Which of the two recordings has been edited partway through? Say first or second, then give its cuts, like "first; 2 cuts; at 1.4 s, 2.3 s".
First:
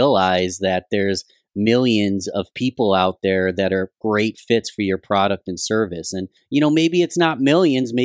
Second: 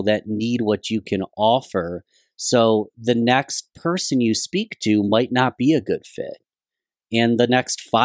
first; 1 cut; at 6.3 s